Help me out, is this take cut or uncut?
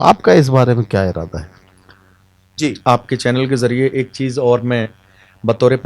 cut